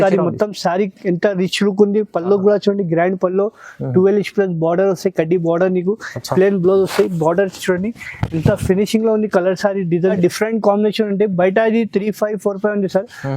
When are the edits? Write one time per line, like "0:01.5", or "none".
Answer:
0:10.2